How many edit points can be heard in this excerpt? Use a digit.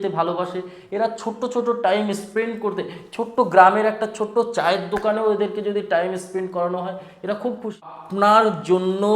1